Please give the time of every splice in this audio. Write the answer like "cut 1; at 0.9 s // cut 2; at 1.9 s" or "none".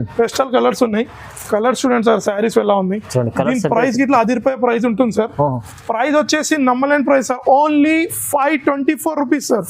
none